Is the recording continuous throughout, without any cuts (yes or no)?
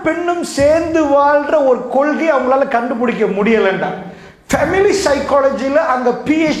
yes